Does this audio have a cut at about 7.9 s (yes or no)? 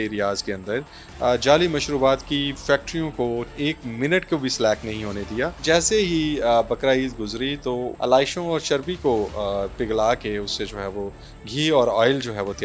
yes